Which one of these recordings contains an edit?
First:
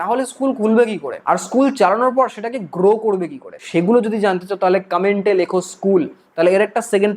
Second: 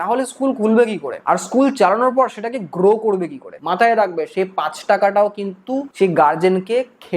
second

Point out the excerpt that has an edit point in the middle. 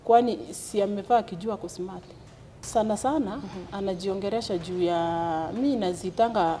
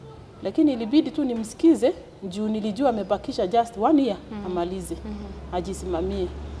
first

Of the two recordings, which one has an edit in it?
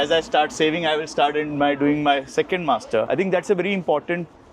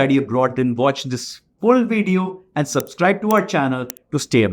first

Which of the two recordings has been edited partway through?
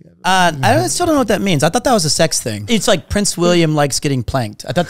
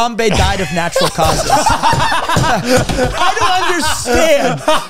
first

